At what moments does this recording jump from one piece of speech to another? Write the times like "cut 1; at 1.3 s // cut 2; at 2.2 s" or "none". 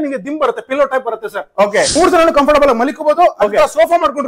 cut 1; at 1.9 s